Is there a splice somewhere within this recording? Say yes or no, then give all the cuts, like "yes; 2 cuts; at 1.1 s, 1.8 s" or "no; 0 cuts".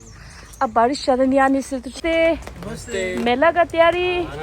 yes; 1 cut; at 2.0 s